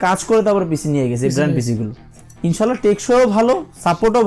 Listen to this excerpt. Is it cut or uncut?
cut